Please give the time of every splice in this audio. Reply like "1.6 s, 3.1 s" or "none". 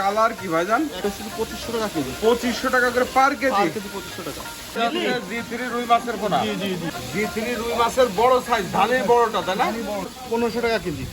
1.0 s, 4.8 s, 7.0 s, 10.2 s

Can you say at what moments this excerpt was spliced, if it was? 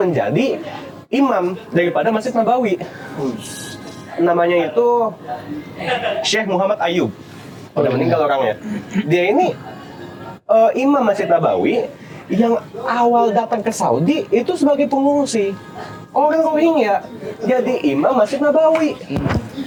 none

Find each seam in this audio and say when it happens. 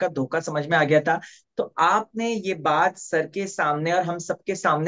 none

